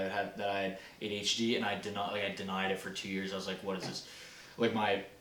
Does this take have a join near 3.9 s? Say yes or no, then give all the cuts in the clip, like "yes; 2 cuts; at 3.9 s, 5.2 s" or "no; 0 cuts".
no; 0 cuts